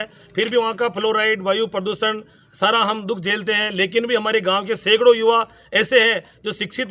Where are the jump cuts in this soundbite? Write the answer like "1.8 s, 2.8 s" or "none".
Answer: none